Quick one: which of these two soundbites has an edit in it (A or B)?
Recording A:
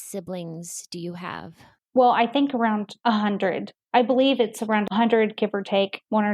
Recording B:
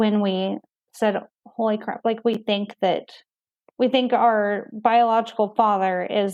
A